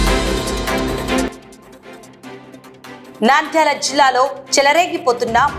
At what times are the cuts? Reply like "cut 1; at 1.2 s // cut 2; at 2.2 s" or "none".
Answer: cut 1; at 1.3 s // cut 2; at 3.1 s